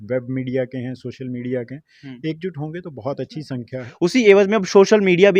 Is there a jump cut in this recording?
yes; 1 cut; at 3.8 s

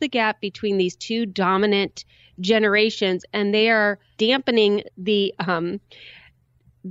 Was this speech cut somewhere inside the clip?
yes; 1 cut; at 4.1 s

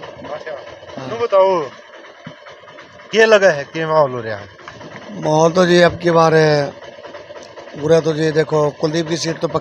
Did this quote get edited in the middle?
no; 0 cuts

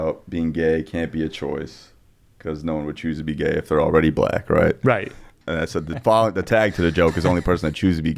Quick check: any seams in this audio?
yes; 1 cut; at 5.3 s

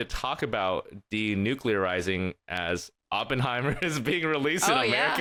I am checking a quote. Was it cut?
no; 0 cuts

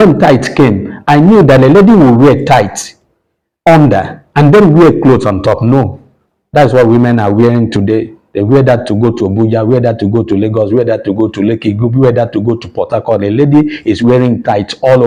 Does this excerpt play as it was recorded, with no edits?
yes; 0 cuts

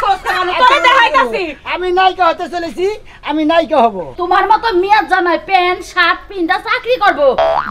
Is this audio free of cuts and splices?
no; 1 cut; at 4.3 s

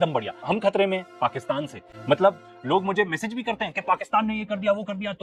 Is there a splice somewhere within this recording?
no; 0 cuts

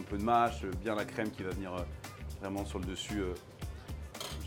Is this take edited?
no; 0 cuts

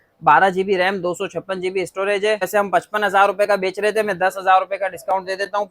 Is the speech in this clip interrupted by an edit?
yes; 1 cut; at 2.5 s

